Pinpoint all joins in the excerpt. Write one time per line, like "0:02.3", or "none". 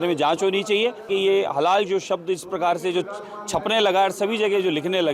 0:01.1